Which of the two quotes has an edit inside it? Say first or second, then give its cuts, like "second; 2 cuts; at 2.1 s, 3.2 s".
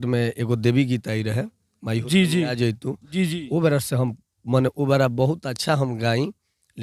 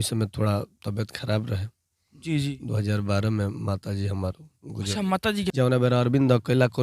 second; 1 cut; at 5.5 s